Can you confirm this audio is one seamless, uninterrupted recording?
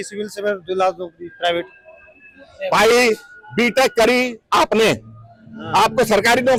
yes; 0 cuts

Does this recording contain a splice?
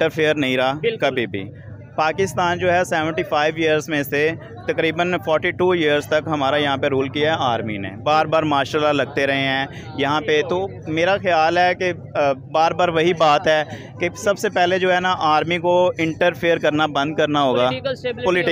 no; 0 cuts

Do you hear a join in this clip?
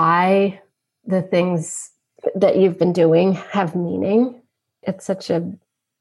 yes; 2 cuts; at 2.1 s, 4.8 s

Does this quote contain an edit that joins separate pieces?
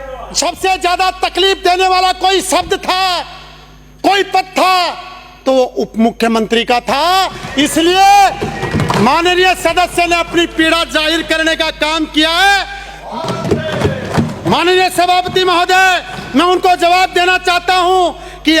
yes; 1 cut; at 12.9 s

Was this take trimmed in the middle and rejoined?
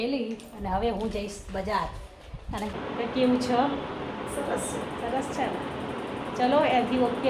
yes; 1 cut; at 2.7 s

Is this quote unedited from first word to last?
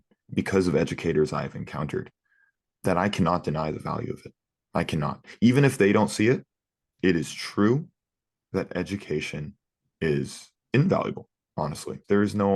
yes; 0 cuts

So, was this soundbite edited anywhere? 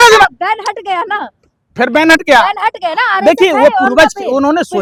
no; 0 cuts

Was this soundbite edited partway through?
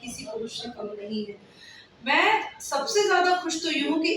no; 0 cuts

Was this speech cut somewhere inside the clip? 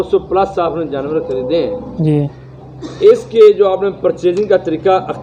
no; 0 cuts

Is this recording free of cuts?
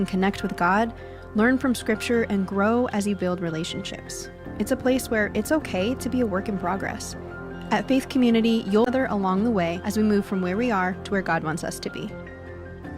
no; 1 cut; at 8.9 s

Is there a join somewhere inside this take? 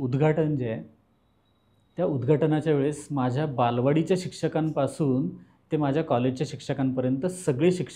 no; 0 cuts

